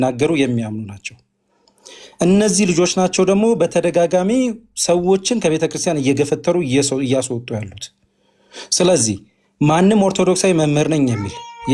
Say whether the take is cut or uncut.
uncut